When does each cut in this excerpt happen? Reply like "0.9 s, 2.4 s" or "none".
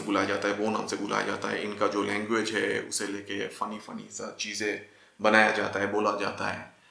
none